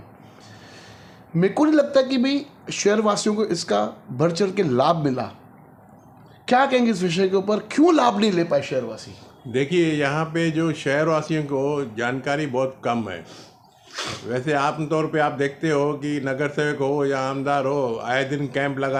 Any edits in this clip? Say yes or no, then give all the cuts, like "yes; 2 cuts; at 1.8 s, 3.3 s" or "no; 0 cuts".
no; 0 cuts